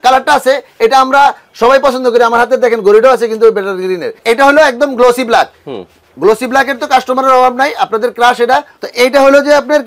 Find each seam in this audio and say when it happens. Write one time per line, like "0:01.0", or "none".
0:04.1
0:08.8